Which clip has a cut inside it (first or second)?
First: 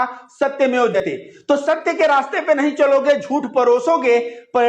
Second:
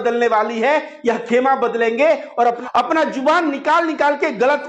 first